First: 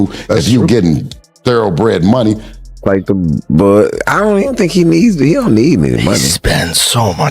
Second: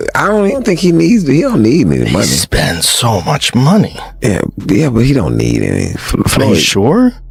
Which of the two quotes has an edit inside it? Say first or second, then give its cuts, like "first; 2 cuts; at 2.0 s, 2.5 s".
first; 1 cut; at 2.8 s